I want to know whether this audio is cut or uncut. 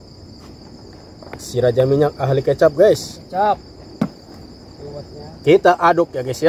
uncut